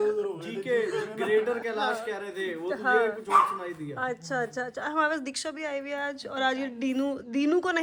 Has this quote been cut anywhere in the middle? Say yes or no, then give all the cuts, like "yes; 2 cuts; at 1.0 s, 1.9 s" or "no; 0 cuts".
no; 0 cuts